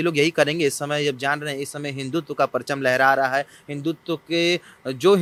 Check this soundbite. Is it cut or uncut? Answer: uncut